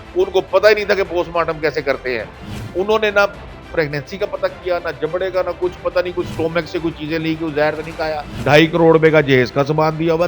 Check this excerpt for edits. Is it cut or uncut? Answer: cut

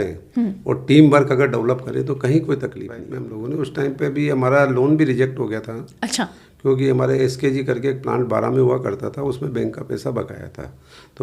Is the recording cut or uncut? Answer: cut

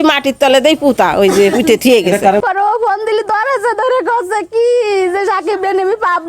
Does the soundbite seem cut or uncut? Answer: cut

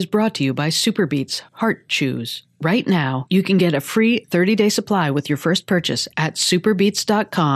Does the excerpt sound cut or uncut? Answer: uncut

